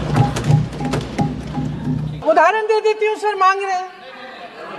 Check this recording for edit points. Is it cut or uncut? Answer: cut